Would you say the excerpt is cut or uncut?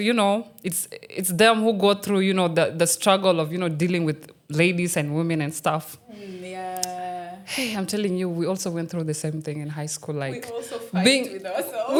uncut